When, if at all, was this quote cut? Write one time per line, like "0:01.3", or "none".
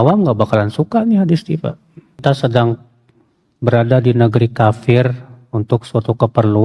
0:02.2